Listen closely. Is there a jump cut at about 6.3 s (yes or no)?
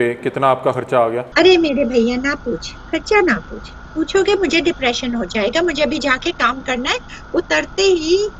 no